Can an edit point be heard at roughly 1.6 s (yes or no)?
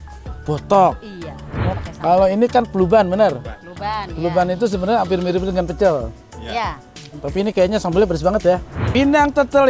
yes